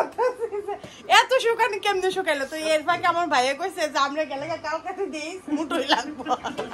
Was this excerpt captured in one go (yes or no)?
yes